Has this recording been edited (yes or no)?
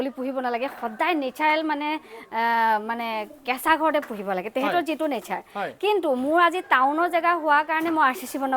no